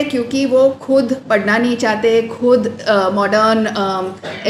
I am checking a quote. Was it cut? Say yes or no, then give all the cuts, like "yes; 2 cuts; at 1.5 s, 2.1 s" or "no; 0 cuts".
no; 0 cuts